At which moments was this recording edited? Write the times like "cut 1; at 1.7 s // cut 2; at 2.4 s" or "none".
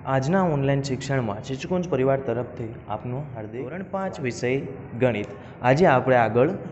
cut 1; at 3.8 s